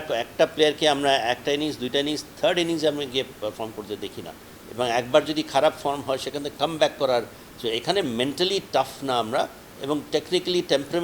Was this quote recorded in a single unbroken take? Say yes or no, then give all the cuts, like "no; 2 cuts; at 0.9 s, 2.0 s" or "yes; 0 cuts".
yes; 0 cuts